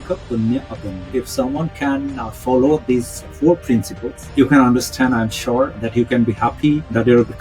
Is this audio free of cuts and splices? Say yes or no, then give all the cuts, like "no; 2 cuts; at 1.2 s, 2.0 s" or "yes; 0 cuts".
no; 2 cuts; at 1.1 s, 5.8 s